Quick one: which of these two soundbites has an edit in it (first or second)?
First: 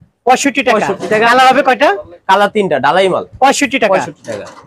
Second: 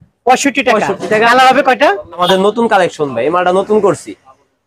second